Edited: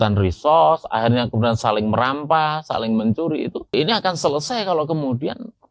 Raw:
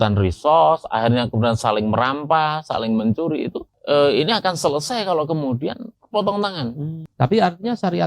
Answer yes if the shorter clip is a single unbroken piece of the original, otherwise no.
no